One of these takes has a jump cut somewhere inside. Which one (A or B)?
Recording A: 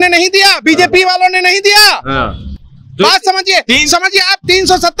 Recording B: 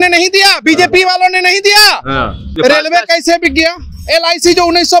B